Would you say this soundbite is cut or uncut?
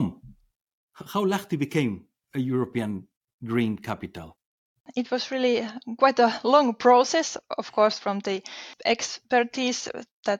cut